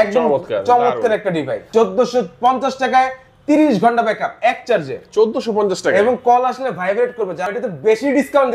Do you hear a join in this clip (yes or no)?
yes